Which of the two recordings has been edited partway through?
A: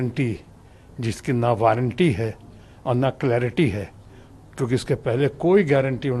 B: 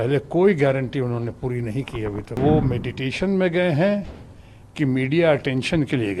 B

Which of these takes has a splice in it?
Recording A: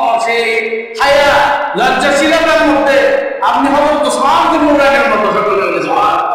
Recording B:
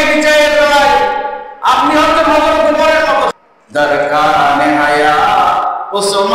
B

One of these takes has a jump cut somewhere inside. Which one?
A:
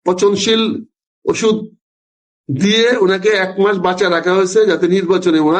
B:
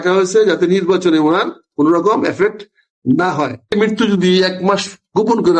B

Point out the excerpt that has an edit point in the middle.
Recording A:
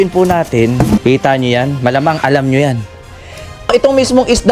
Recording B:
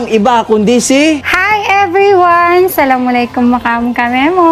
A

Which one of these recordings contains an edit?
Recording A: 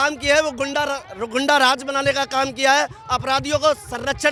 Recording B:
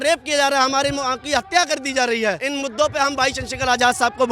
B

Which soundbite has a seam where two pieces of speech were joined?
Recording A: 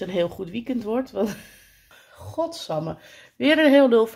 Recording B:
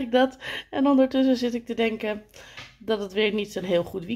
A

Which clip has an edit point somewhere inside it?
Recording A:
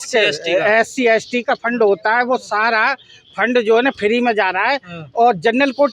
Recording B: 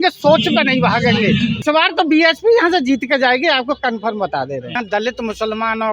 B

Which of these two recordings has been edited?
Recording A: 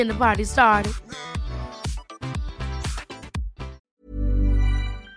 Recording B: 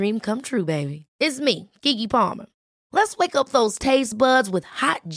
A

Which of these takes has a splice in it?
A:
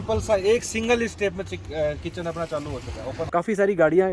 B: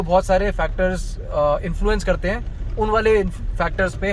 A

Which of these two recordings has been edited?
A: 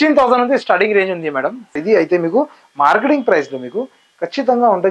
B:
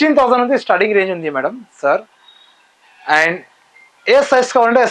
A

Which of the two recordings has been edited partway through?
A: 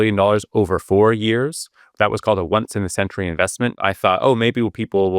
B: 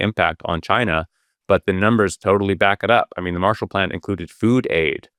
A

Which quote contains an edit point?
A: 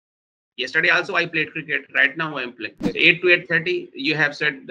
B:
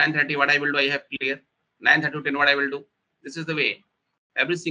A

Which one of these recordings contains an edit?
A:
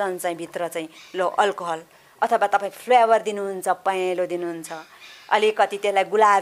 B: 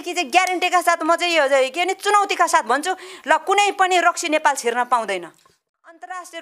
B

